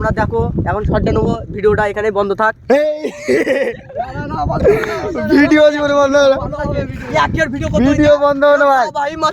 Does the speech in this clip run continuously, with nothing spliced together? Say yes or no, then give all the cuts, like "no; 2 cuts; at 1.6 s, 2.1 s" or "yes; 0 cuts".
yes; 0 cuts